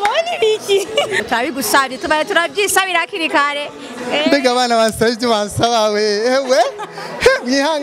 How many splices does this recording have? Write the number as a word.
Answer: one